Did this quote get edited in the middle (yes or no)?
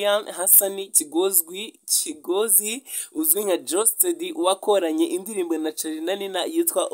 no